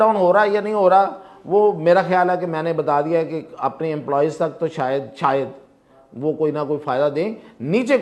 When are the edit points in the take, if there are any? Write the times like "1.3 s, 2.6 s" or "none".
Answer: none